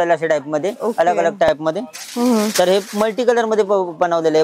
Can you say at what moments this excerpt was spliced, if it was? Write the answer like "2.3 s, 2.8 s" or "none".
none